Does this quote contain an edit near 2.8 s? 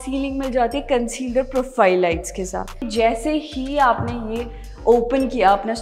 yes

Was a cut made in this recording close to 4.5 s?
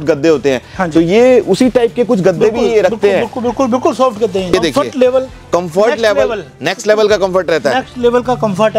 yes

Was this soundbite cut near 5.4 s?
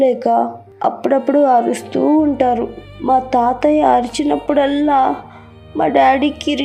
no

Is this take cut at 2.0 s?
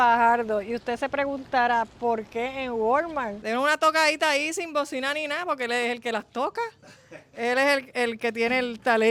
no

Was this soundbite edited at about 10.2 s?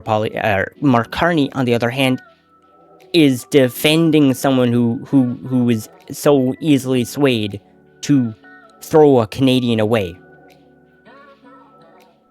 yes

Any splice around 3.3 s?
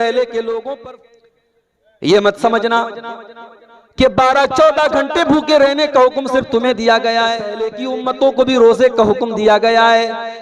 no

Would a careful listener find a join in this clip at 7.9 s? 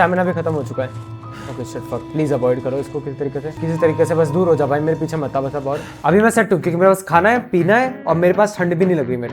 no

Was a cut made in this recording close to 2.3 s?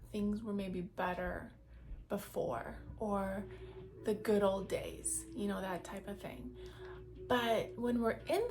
no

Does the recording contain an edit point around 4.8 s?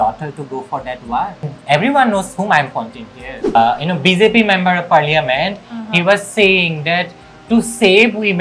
no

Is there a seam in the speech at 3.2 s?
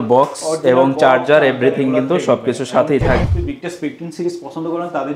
yes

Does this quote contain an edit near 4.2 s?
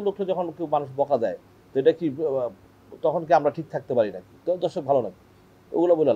no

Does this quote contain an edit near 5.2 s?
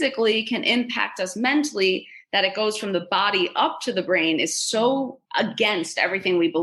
yes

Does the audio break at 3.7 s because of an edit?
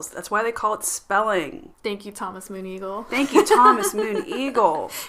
no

